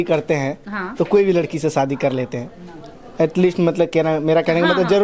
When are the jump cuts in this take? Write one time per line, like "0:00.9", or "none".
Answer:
none